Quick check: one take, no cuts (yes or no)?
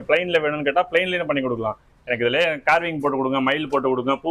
yes